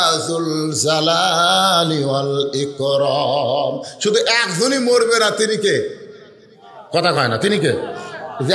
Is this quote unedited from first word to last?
yes; 0 cuts

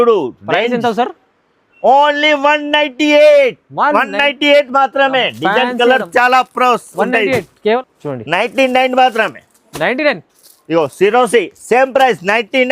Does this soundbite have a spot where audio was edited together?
yes; 1 cut; at 7.8 s

